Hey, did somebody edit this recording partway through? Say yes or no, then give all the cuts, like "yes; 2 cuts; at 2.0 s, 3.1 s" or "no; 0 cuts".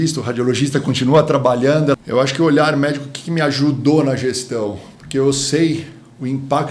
yes; 1 cut; at 2.0 s